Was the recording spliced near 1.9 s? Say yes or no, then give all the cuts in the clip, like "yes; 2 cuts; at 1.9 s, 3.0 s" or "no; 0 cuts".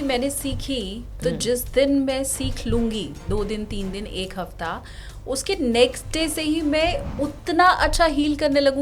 no; 0 cuts